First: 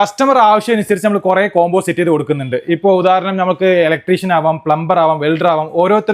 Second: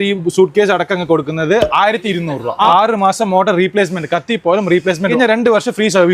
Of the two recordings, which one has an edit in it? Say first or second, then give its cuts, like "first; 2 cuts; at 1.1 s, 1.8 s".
second; 2 cuts; at 2.7 s, 5.1 s